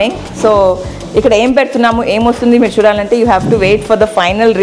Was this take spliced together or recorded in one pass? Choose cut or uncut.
uncut